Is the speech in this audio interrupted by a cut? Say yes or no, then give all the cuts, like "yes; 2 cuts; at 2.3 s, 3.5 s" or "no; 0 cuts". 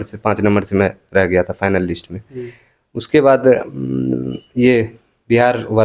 no; 0 cuts